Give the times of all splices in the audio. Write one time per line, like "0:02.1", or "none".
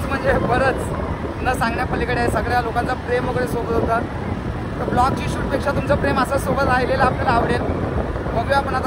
none